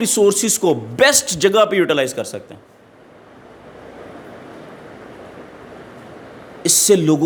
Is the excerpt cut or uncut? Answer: uncut